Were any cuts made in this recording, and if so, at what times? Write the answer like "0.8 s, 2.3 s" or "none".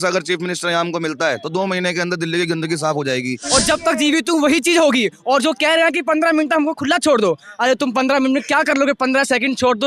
3.4 s